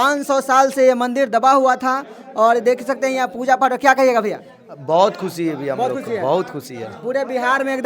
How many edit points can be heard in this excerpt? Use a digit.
0